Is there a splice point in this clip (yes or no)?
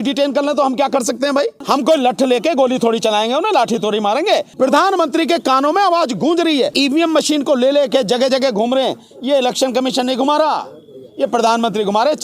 yes